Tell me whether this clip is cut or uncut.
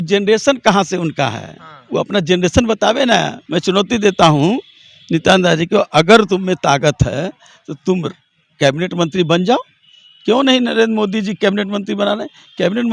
cut